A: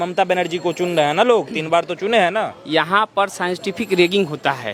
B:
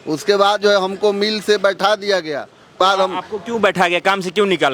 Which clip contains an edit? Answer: B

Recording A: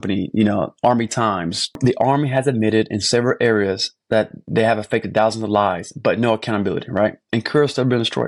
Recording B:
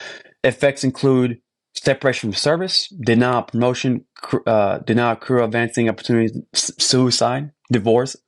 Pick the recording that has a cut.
A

